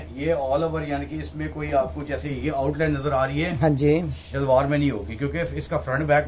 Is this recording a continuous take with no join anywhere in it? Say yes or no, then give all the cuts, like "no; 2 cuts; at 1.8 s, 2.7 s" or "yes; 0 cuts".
yes; 0 cuts